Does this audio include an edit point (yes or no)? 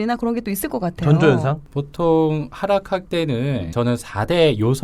yes